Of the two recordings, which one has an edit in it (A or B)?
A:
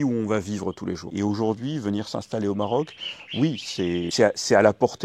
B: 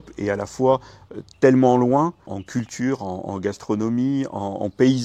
A